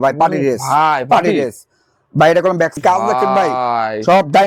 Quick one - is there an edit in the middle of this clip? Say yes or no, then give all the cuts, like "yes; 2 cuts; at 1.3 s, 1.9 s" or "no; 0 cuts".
yes; 1 cut; at 2.7 s